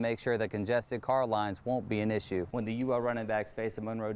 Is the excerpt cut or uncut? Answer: cut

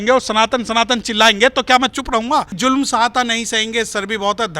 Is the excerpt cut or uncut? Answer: cut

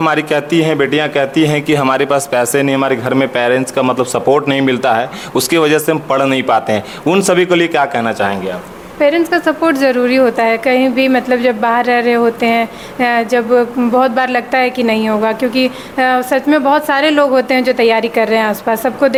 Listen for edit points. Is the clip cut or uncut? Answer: uncut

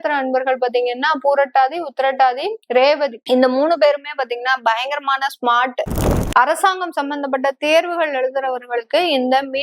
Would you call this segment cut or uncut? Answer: cut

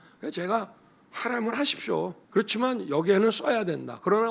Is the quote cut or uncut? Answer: cut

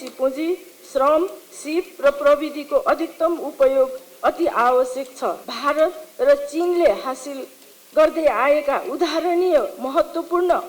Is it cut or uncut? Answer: cut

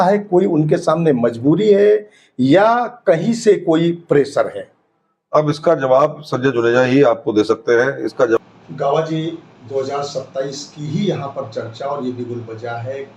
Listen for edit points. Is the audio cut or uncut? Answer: cut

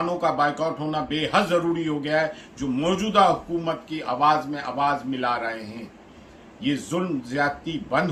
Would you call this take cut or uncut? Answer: uncut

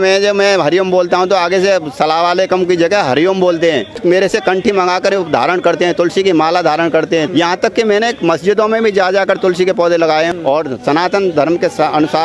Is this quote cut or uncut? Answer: cut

